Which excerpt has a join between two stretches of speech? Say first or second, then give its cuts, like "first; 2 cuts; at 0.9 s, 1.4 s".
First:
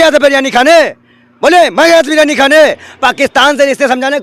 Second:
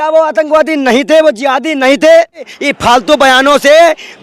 second; 1 cut; at 2.6 s